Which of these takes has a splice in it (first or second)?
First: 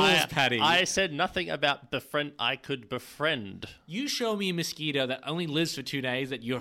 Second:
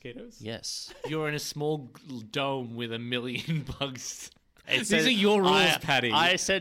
second